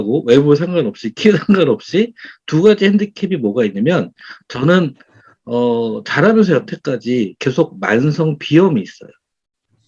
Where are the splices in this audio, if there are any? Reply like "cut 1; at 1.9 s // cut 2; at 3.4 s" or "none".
none